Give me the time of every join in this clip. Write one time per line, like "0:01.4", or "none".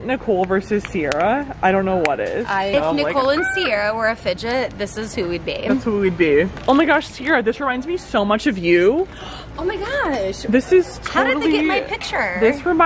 0:02.7
0:06.6